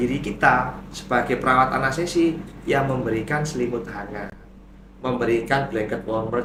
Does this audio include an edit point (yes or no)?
no